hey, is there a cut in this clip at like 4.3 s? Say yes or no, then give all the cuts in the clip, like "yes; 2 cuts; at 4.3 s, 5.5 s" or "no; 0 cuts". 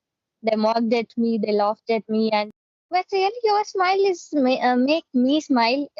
no; 1 cut; at 2.5 s